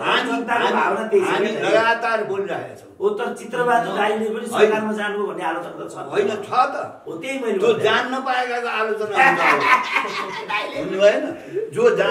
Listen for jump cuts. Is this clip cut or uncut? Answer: uncut